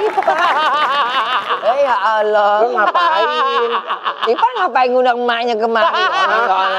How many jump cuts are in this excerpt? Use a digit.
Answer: 0